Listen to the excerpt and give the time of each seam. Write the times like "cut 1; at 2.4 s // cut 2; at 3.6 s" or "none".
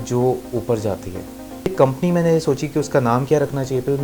cut 1; at 1.7 s